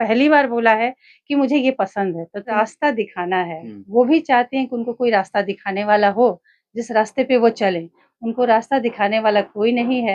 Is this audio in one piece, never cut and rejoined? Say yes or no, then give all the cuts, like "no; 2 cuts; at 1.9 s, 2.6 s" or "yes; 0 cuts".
no; 1 cut; at 2.5 s